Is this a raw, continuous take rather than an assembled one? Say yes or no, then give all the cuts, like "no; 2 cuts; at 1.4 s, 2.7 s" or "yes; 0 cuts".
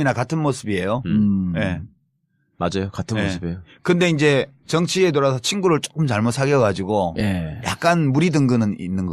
no; 1 cut; at 2.9 s